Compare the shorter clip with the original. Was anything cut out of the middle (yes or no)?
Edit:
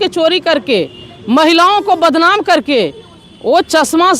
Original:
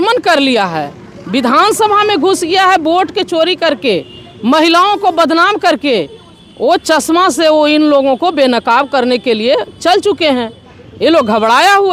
no